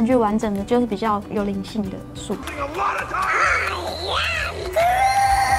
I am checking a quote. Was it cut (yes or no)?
no